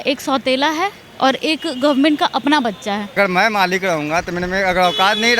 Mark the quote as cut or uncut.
cut